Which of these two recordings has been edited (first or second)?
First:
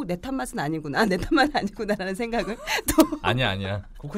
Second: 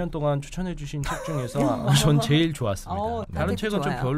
second